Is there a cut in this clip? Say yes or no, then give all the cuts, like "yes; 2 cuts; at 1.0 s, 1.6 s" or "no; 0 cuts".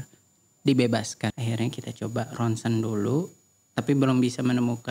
yes; 1 cut; at 1.3 s